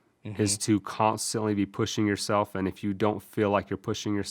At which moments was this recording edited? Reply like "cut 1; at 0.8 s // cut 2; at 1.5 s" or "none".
none